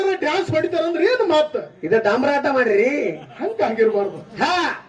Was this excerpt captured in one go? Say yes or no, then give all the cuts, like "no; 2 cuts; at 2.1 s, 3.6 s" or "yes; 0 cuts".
yes; 0 cuts